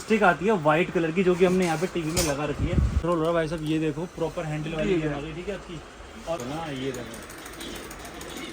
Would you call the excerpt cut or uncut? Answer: cut